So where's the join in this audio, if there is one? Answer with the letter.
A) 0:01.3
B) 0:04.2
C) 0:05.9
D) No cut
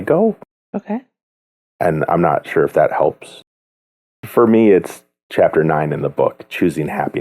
B